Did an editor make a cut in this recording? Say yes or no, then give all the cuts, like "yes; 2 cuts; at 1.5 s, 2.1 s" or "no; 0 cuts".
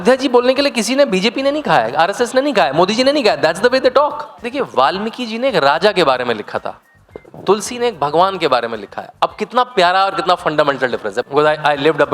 yes; 2 cuts; at 4.4 s, 11.2 s